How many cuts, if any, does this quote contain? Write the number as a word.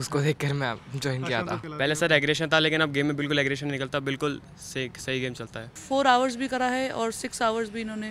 two